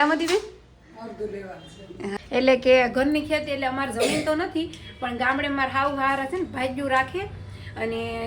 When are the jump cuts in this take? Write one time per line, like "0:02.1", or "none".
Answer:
0:02.1